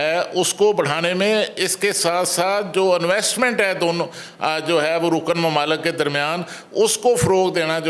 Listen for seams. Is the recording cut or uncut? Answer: uncut